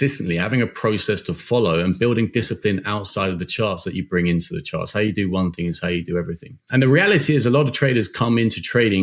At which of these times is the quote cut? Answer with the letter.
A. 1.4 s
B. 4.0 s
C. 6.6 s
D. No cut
C